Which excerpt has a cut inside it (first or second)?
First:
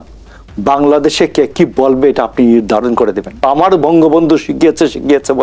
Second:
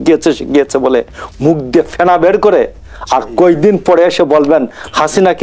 first